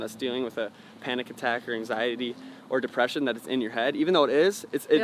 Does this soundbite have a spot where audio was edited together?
no; 0 cuts

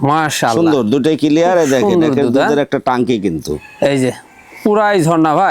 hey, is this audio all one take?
yes; 0 cuts

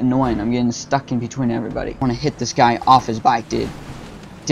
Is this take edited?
yes; 1 cut; at 2.0 s

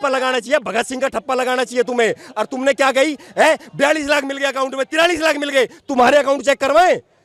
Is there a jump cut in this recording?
no; 0 cuts

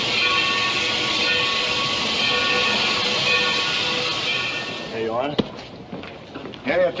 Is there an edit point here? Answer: no; 0 cuts

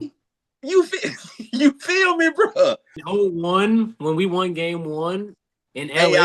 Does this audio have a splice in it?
yes; 1 cut; at 2.9 s

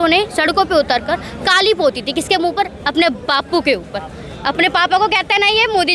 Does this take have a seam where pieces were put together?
no; 0 cuts

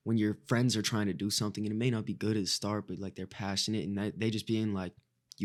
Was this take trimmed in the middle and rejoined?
no; 0 cuts

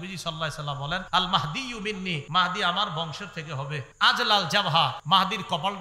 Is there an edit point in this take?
yes; 4 cuts; at 1.1 s, 2.2 s, 3.8 s, 5.0 s

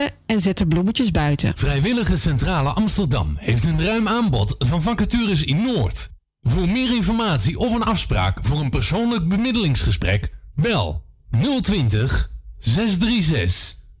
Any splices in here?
yes; 1 cut; at 1.6 s

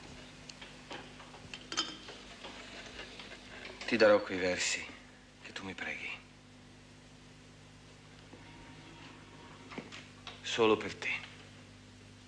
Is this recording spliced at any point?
yes; 1 cut; at 7.4 s

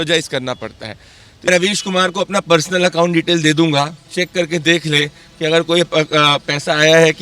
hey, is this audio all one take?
no; 1 cut; at 1.5 s

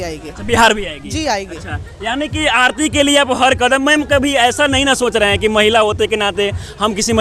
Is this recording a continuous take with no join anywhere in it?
yes; 0 cuts

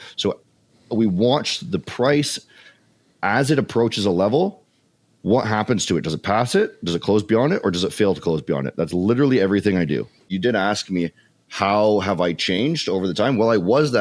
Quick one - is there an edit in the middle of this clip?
yes; 1 cut; at 10.3 s

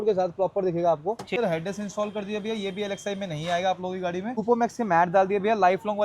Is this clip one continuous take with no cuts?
no; 2 cuts; at 1.4 s, 4.4 s

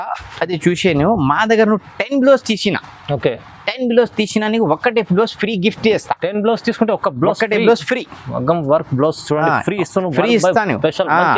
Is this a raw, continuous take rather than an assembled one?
yes; 0 cuts

